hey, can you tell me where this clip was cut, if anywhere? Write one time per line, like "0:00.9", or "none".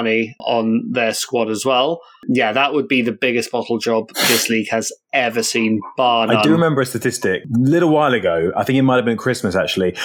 none